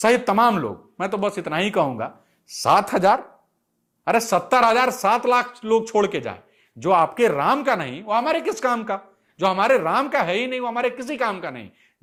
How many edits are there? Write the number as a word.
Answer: zero